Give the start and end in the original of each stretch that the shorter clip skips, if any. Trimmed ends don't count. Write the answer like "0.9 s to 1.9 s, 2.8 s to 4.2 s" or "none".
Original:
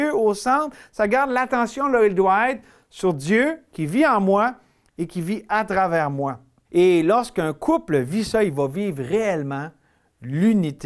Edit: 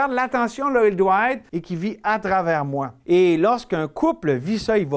2.7 s to 5.0 s, 6.4 s to 6.6 s